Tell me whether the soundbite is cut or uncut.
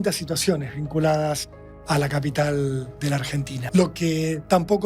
cut